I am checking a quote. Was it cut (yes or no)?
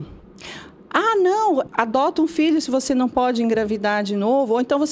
yes